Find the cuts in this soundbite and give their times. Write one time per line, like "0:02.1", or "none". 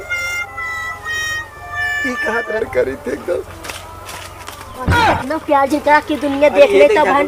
0:02.6